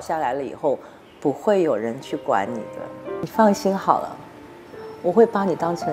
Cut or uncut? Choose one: cut